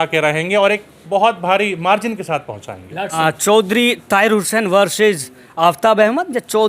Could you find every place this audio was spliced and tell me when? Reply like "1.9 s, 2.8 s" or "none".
3.2 s

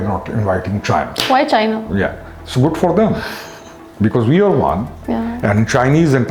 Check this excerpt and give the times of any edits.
none

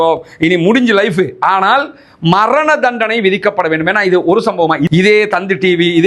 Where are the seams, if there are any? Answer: 4.8 s

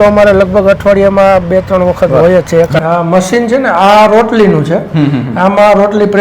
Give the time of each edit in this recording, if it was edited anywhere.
2.8 s

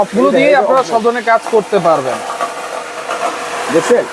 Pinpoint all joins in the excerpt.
none

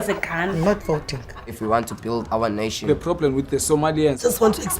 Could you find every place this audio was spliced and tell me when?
none

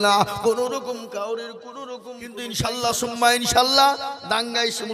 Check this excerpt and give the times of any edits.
2.4 s

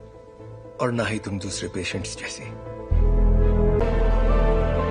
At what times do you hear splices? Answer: 3.8 s

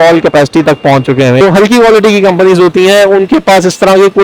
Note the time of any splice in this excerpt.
1.4 s

